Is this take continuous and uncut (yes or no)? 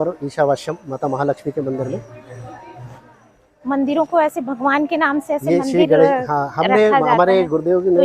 yes